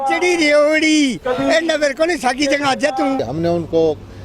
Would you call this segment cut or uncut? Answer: cut